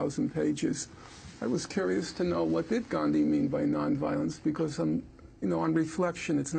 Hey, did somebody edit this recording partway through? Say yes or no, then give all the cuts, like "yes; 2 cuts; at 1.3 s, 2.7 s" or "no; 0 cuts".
no; 0 cuts